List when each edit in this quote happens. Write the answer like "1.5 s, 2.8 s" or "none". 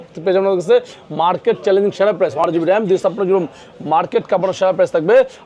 2.4 s